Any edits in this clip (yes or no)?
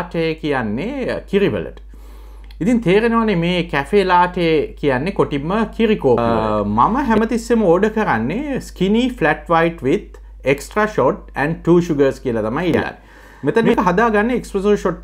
yes